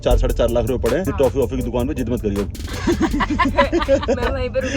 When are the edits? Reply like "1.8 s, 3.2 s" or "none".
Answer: 1.1 s